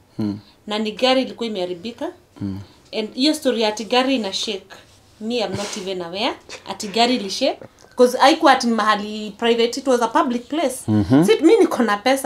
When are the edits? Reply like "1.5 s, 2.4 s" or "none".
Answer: 7.6 s